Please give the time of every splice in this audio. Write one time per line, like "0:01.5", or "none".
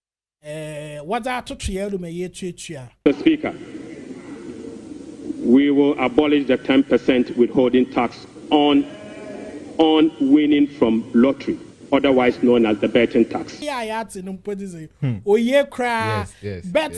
0:03.0
0:13.6

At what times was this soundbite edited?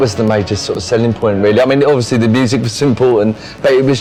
none

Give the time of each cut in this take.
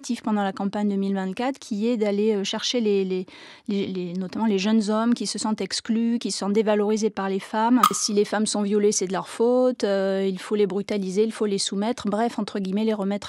0:08.0

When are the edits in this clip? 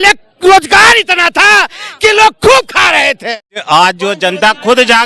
0:03.6

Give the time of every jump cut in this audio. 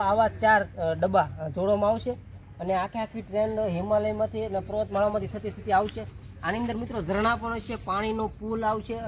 none

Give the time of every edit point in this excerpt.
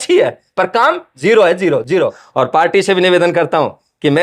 0:02.2

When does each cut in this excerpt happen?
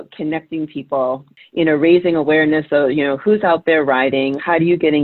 0:01.4

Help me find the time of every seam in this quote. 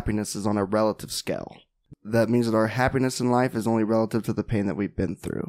0:01.8

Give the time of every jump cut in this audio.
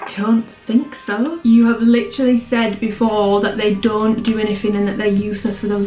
0:01.4

